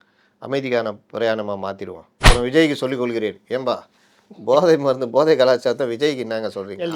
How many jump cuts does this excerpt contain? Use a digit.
1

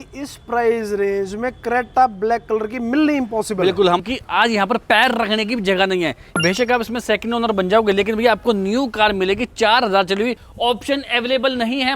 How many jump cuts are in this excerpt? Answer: 3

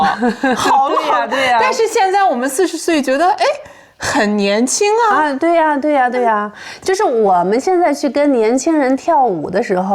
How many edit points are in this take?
0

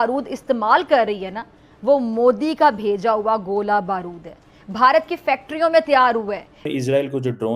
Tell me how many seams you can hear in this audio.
1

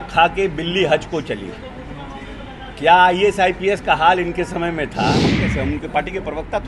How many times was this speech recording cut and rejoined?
1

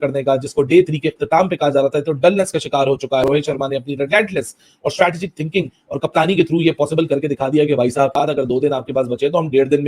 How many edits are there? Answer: 2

